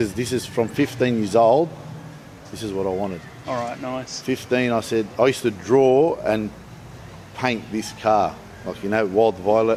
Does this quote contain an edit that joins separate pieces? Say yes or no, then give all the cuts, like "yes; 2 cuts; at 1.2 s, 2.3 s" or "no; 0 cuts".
no; 0 cuts